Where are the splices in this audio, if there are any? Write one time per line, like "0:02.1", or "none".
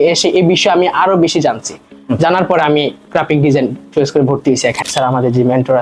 0:04.9